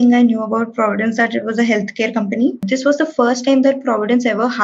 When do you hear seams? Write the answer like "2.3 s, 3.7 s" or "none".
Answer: 2.6 s